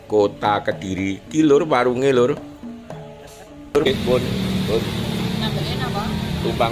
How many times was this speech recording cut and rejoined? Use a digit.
1